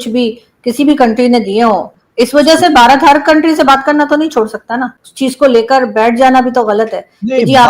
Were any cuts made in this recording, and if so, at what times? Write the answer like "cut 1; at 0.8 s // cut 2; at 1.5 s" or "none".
cut 1; at 2.0 s // cut 2; at 5.0 s